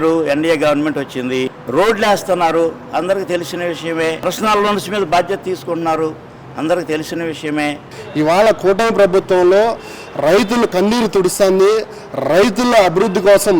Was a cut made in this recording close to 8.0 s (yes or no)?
yes